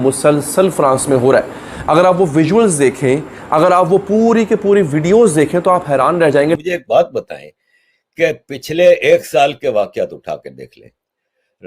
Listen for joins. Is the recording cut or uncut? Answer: cut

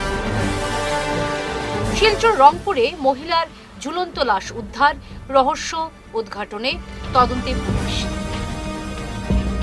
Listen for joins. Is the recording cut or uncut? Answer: cut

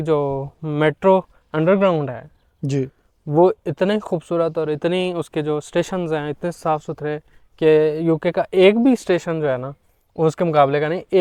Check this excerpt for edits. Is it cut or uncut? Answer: uncut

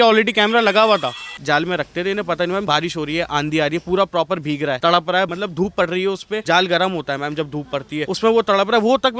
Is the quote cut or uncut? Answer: cut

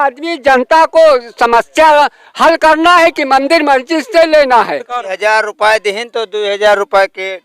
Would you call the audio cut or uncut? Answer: cut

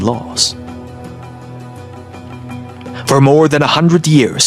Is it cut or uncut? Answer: uncut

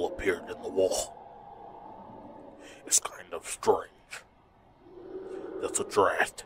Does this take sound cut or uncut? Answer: uncut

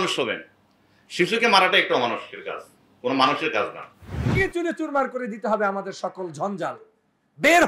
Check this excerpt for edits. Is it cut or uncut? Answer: cut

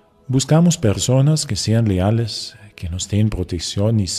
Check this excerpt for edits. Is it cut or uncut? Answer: cut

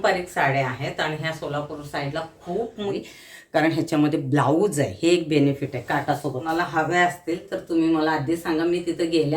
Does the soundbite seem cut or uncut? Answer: cut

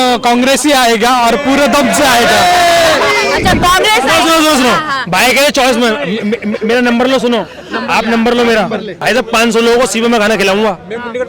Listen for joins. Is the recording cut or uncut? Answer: cut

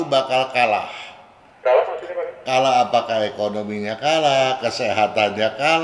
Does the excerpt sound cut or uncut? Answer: uncut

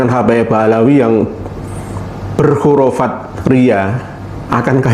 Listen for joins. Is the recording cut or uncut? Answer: uncut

